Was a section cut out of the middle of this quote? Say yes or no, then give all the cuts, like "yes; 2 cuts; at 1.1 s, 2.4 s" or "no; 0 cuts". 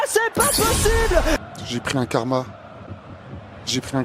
yes; 1 cut; at 1.4 s